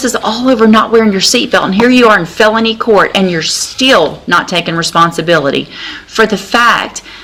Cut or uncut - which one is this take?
uncut